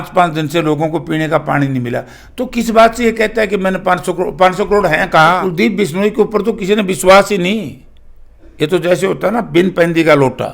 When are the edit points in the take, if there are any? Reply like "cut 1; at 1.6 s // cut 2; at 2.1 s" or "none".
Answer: cut 1; at 5.4 s